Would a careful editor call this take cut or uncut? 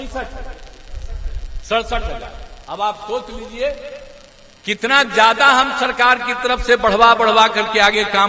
uncut